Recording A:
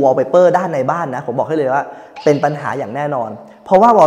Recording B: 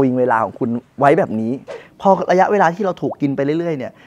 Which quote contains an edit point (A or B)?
B